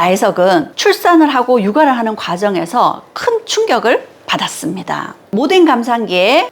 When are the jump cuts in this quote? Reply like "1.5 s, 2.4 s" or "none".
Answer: 5.1 s